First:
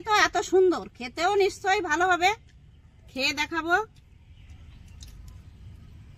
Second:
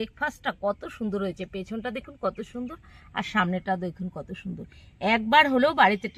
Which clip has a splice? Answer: first; 1 cut; at 4.2 s

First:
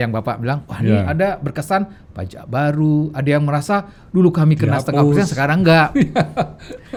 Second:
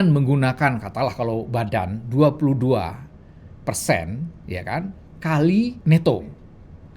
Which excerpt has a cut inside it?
second; 1 cut; at 5.8 s

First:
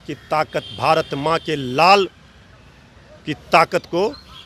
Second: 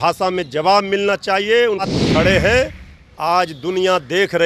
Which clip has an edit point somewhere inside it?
second; 1 cut; at 2.0 s

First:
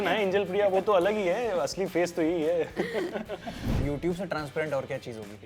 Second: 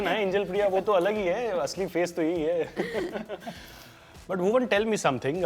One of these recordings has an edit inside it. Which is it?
first; 1 cut; at 3.8 s

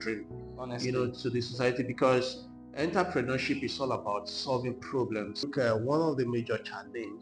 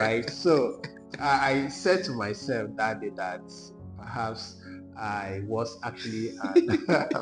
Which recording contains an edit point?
first; 1 cut; at 5.5 s

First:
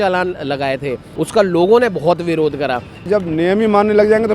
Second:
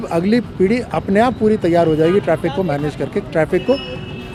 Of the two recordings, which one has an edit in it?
first; 2 cuts; at 1.1 s, 3.1 s

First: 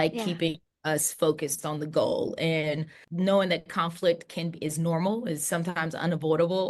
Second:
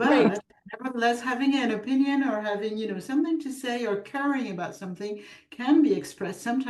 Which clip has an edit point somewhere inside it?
first; 1 cut; at 3.0 s

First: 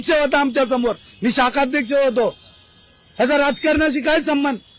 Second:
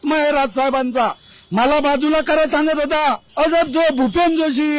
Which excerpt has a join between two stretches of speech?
second; 1 cut; at 3.2 s

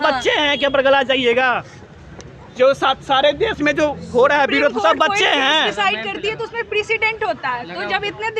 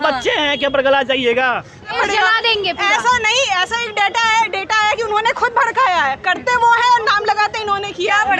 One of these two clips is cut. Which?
second; 1 cut; at 1.9 s

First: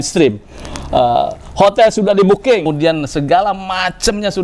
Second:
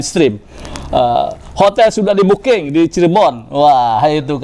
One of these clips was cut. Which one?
first; 1 cut; at 2.7 s

